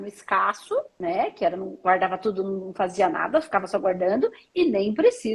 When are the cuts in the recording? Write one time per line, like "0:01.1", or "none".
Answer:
0:00.9